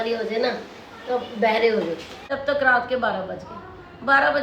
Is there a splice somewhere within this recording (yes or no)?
yes